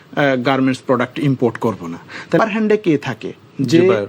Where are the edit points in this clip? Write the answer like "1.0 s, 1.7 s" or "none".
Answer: 2.4 s